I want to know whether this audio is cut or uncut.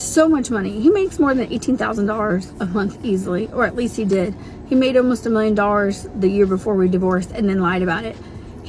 uncut